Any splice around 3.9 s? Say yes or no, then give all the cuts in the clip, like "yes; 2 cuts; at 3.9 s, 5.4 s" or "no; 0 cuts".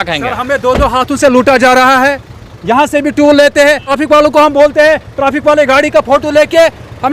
yes; 1 cut; at 3.9 s